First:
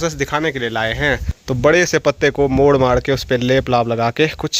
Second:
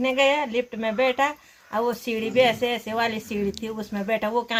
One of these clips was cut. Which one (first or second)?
first